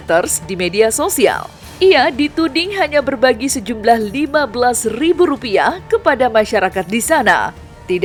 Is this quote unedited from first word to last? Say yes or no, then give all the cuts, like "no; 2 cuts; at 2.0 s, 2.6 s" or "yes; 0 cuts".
yes; 0 cuts